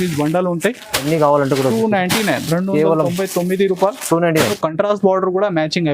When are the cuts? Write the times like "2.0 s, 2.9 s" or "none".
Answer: 4.5 s